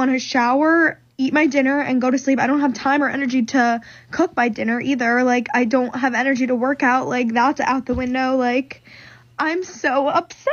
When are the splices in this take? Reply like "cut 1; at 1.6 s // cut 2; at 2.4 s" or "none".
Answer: none